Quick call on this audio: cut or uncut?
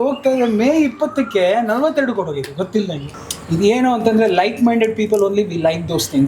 cut